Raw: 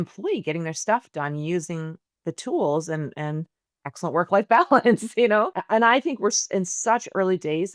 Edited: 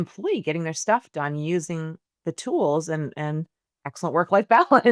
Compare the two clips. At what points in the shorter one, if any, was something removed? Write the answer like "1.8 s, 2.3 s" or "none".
none